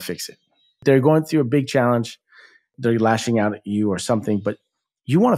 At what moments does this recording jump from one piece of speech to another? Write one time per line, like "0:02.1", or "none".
0:00.8
0:02.7